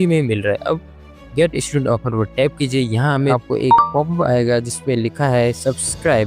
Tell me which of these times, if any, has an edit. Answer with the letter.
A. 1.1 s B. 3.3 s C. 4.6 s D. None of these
B